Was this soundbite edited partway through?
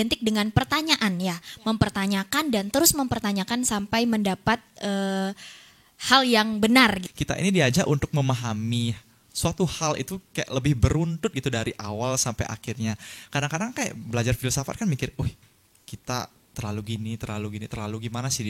yes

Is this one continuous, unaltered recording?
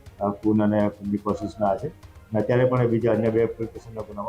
yes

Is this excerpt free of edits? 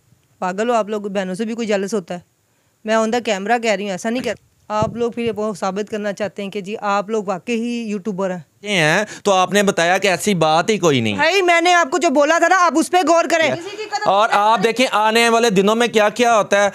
no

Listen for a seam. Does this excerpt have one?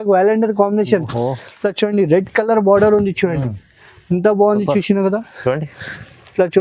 no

